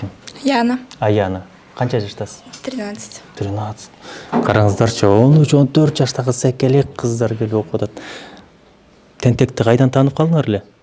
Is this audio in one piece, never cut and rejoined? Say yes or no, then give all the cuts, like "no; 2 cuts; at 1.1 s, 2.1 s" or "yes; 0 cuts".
yes; 0 cuts